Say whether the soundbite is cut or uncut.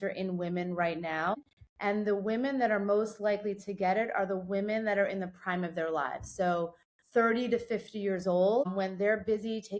cut